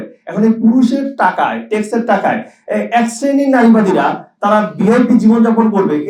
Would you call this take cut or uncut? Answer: uncut